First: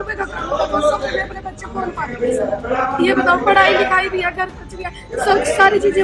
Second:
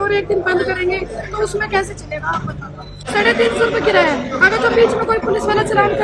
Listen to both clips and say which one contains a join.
second; 1 cut; at 3.0 s

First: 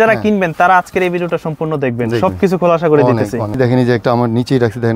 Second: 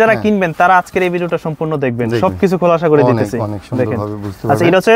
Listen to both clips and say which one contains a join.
first; 1 cut; at 3.5 s

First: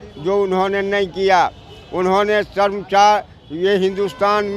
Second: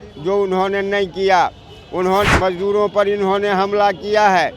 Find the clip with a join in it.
second; 1 cut; at 2.3 s

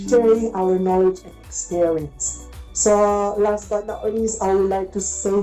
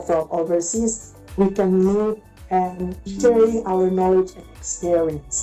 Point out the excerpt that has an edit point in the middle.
first; 1 cut; at 4.3 s

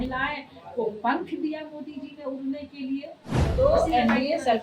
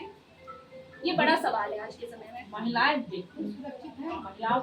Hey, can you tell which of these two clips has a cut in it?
first; 1 cut; at 3.5 s

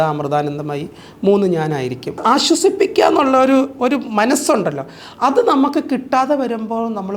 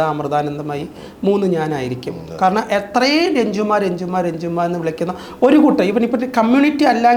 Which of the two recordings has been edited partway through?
first; 1 cut; at 2.2 s

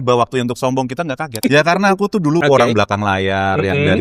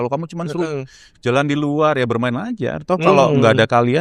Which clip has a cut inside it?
first; 2 cuts; at 1.3 s, 2.4 s

